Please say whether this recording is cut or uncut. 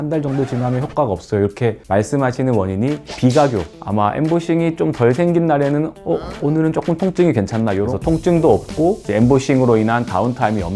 cut